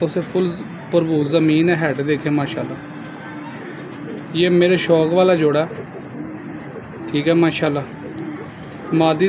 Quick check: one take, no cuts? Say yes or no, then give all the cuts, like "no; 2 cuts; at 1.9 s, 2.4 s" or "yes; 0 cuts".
yes; 0 cuts